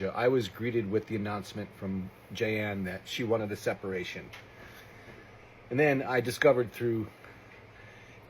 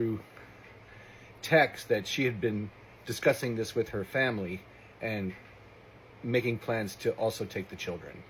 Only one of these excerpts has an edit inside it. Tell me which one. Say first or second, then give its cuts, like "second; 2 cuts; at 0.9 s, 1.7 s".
first; 1 cut; at 5.9 s